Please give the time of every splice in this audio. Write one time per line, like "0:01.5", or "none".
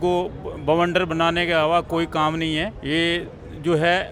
0:02.8